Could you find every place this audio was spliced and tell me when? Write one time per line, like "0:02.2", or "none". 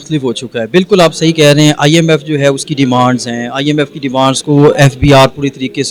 none